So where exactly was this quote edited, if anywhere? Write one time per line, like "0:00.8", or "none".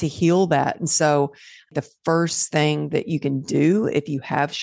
0:01.7